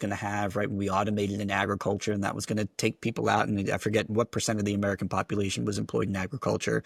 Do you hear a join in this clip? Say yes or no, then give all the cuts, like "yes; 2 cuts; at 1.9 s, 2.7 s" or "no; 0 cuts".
no; 0 cuts